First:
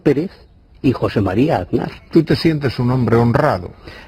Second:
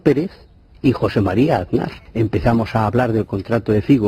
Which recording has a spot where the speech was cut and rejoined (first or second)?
second